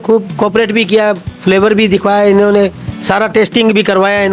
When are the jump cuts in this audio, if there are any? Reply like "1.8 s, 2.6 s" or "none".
none